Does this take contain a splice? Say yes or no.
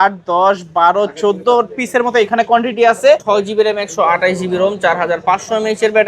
yes